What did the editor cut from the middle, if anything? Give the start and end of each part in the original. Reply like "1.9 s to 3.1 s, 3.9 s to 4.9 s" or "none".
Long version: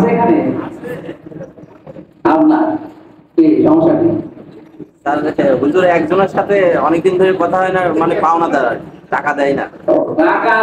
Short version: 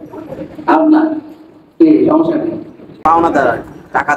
4.6 s to 8.2 s